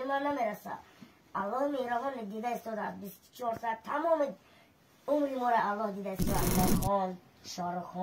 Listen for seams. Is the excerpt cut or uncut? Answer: cut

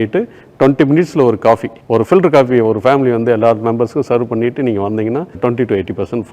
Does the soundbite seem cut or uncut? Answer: cut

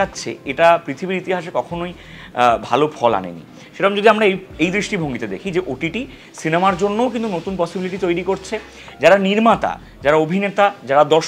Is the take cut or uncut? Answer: uncut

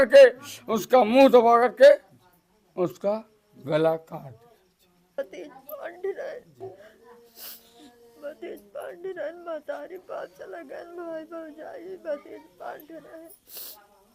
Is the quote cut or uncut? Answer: cut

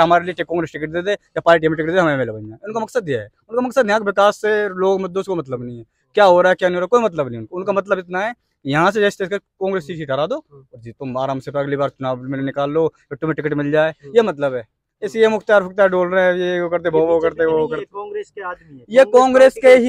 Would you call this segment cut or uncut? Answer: uncut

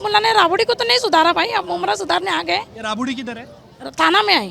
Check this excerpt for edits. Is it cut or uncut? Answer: uncut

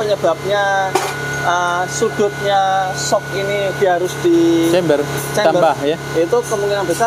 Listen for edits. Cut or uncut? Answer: uncut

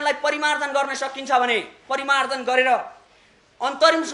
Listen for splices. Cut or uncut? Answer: uncut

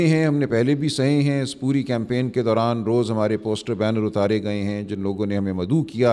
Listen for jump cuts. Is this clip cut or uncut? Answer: uncut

